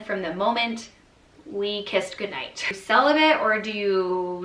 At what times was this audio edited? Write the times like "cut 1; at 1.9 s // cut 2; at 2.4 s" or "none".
cut 1; at 2.7 s